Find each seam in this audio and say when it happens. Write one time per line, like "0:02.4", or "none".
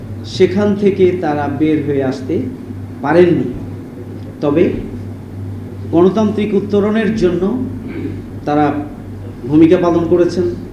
0:08.3